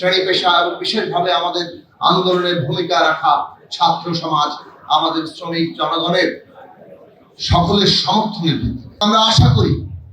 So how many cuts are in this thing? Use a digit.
1